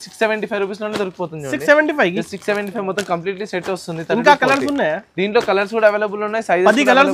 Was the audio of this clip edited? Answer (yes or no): no